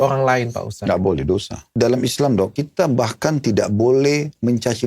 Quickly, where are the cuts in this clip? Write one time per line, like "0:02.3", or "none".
0:01.7
0:02.6